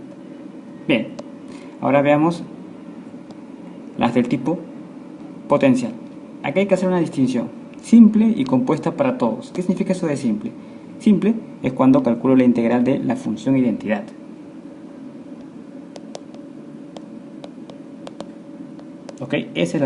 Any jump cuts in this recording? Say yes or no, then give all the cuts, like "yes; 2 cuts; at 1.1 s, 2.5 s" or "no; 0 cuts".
yes; 1 cut; at 8.5 s